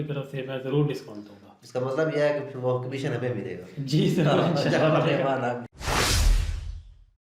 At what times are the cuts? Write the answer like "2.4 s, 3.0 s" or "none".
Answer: 5.7 s